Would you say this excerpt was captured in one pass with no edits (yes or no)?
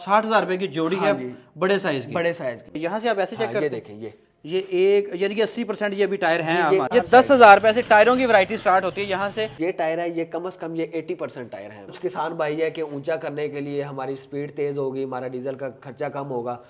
no